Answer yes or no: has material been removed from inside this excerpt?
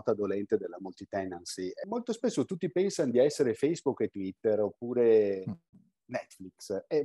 yes